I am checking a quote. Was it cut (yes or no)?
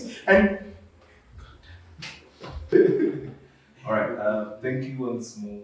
yes